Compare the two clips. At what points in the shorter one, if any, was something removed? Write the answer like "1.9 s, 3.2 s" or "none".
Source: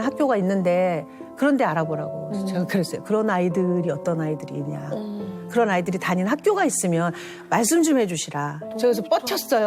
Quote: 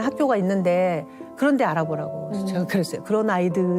none

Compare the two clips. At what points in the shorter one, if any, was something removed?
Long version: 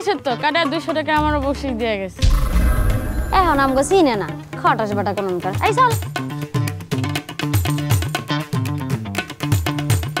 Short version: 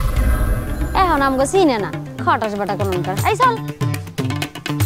3.6 s

